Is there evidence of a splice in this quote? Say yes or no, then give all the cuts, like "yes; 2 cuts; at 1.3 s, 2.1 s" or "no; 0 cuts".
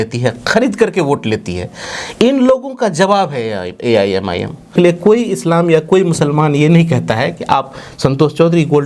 yes; 1 cut; at 4.7 s